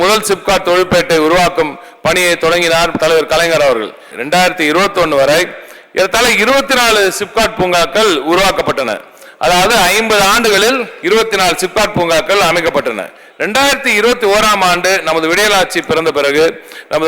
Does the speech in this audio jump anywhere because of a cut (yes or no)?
yes